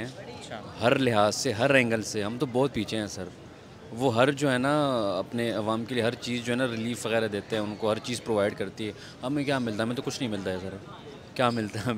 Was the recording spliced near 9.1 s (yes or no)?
no